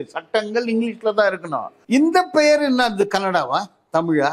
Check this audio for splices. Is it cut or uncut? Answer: cut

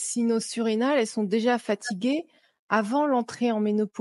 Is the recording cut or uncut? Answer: uncut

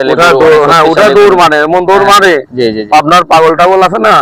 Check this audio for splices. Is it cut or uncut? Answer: uncut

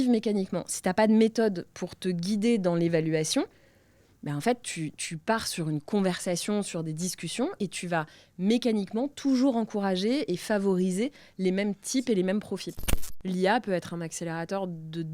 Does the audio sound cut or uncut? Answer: cut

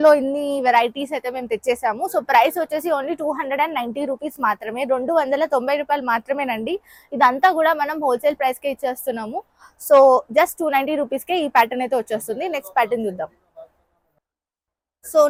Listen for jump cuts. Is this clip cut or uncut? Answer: uncut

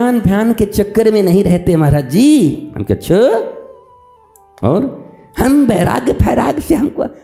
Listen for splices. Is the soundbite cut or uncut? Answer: uncut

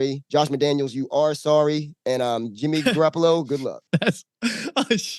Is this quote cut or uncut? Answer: cut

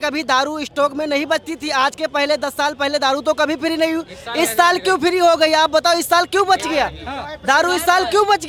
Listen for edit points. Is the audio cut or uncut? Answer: uncut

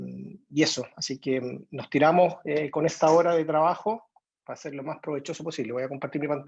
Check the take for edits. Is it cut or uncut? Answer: uncut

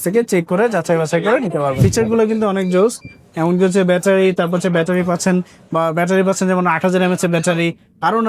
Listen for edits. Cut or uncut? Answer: cut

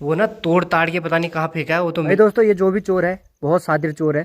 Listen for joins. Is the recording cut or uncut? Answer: cut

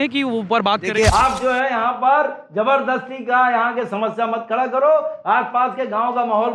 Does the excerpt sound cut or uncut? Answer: cut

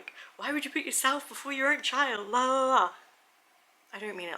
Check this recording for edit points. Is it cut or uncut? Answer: uncut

